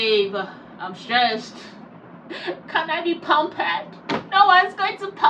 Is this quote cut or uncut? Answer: uncut